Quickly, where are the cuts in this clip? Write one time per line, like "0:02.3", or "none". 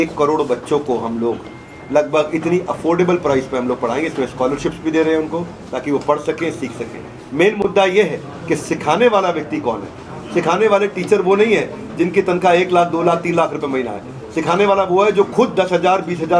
none